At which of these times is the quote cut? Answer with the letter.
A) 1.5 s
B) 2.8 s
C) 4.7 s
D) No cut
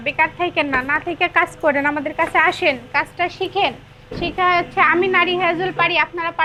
D